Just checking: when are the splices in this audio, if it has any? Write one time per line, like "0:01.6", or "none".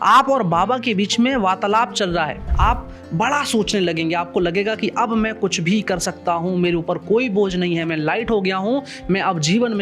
0:02.4